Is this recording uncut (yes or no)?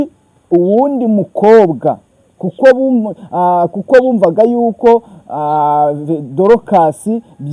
yes